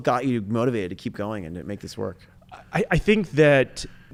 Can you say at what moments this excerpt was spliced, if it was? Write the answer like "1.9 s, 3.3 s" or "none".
none